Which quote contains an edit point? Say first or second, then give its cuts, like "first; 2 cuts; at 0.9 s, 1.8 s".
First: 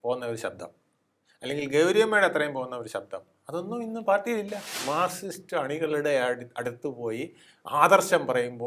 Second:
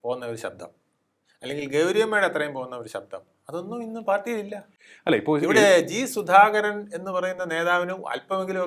first; 1 cut; at 4.8 s